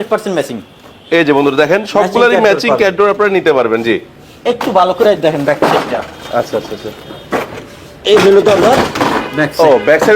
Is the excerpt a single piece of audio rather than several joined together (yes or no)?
no